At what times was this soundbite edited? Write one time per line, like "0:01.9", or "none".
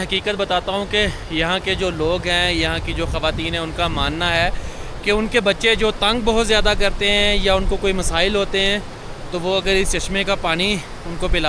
none

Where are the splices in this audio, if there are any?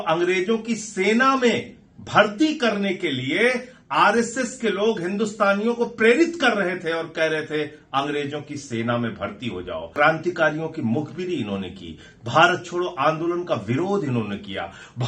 0:09.9

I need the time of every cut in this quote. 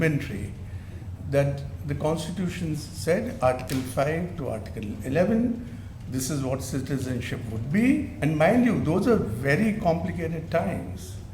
0:08.1

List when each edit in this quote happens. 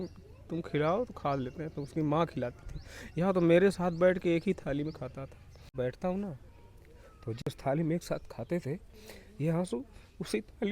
0:05.7

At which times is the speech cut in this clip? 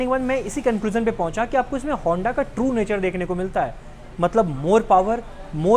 none

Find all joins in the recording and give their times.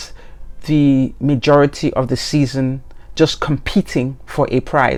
none

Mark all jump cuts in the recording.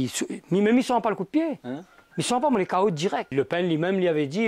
0:03.3

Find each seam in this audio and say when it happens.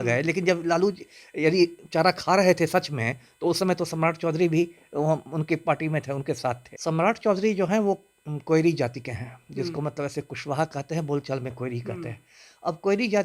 0:06.7

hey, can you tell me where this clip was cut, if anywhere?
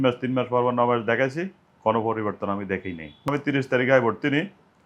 0:03.3

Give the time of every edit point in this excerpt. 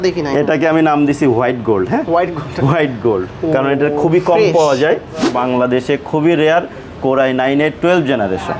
0:05.3

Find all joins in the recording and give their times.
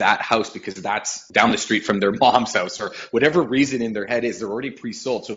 0:01.2

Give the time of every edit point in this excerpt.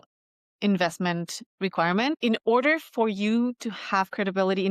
0:02.2

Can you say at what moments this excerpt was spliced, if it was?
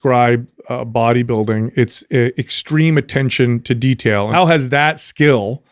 0:04.3

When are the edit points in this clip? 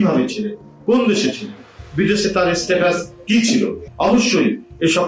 0:03.8

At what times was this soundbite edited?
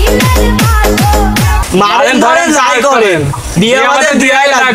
0:01.6

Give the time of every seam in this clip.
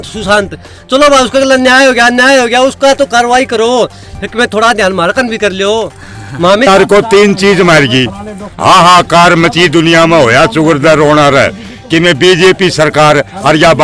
0:06.7

